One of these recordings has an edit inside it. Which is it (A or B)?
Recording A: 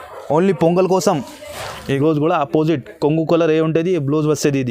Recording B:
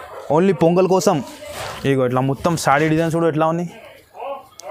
A